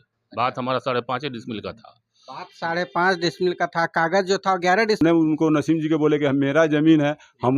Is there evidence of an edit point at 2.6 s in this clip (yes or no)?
no